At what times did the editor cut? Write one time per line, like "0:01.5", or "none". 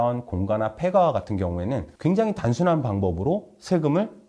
0:01.9